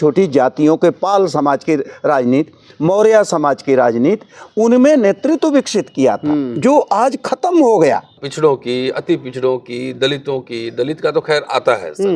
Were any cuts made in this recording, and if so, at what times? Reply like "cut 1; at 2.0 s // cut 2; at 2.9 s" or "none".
cut 1; at 8.2 s